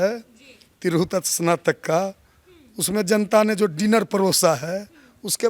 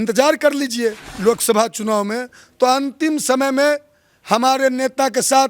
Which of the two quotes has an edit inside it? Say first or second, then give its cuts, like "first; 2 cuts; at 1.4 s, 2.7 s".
second; 1 cut; at 1.1 s